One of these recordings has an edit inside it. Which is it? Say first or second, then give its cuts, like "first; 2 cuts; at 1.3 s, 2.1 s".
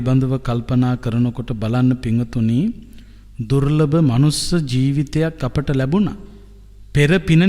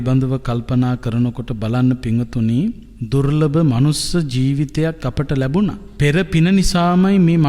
second; 2 cuts; at 2.9 s, 5.9 s